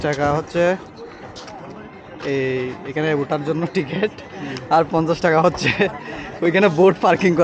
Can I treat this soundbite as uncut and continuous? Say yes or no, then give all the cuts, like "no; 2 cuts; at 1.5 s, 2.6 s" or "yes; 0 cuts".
yes; 0 cuts